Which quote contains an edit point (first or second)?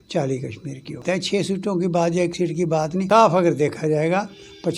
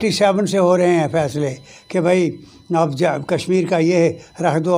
first